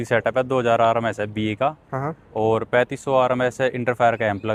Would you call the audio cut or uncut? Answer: uncut